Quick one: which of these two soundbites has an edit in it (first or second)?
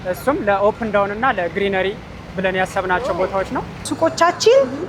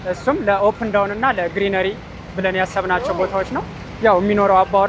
first